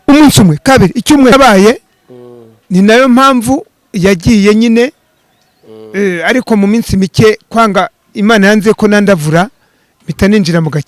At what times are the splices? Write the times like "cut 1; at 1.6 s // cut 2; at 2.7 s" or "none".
cut 1; at 1.3 s